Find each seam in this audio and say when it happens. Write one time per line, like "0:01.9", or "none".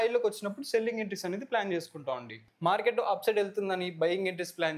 0:02.4